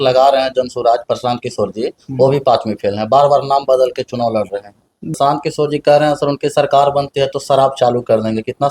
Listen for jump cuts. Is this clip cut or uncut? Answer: cut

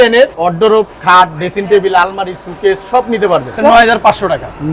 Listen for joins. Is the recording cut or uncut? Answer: cut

